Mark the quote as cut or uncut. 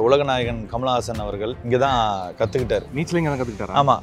cut